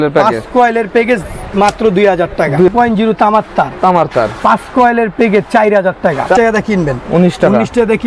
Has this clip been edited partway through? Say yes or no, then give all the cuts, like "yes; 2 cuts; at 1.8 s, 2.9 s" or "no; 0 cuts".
yes; 2 cuts; at 2.7 s, 6.4 s